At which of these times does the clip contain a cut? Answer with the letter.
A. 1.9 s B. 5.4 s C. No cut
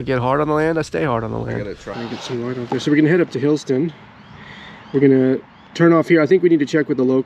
A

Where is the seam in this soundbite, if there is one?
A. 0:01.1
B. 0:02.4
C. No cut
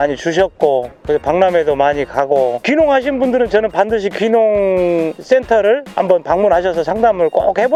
C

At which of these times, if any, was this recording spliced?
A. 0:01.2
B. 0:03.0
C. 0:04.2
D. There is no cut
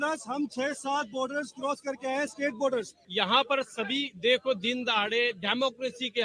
B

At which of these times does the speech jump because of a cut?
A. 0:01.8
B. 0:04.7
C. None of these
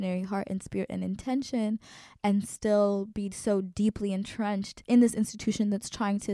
B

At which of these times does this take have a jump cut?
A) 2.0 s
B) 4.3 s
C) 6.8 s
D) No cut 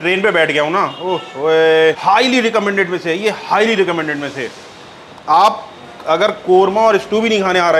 D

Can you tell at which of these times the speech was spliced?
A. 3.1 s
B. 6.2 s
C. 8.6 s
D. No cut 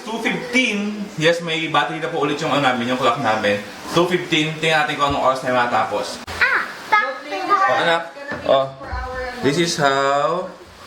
B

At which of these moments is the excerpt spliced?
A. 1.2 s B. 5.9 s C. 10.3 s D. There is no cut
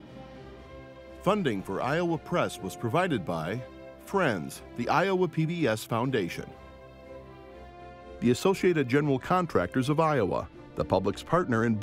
A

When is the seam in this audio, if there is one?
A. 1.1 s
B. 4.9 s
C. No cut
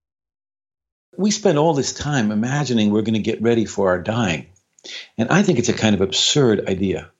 A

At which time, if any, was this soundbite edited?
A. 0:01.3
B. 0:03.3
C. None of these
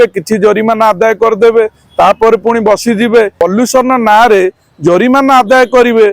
B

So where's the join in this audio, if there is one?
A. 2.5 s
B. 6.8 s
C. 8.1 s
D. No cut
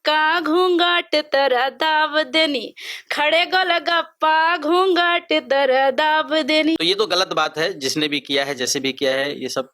B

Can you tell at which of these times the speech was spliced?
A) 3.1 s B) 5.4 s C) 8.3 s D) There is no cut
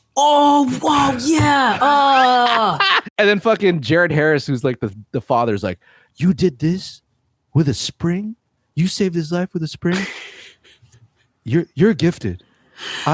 A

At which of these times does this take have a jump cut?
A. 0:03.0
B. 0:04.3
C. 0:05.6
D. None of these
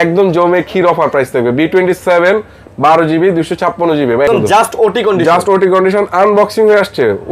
B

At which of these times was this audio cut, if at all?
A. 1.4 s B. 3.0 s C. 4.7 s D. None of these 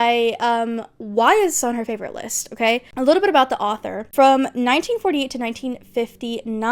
D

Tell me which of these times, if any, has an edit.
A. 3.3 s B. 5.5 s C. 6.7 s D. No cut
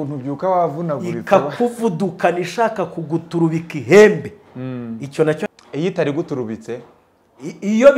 B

